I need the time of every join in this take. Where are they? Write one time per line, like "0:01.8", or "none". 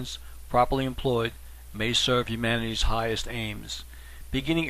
0:03.7